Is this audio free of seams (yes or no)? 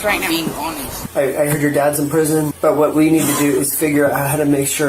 no